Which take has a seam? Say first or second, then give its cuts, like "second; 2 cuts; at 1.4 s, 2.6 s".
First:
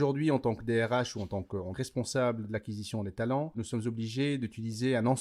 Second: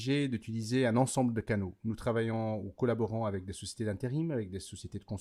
first; 1 cut; at 1.7 s